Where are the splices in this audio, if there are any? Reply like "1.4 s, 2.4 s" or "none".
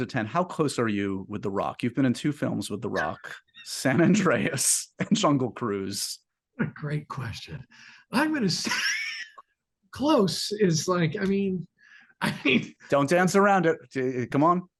none